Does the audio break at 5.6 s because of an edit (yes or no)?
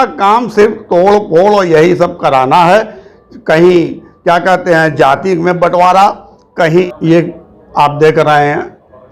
no